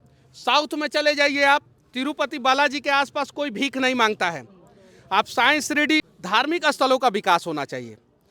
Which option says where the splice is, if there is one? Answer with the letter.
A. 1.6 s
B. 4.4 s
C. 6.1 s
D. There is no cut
C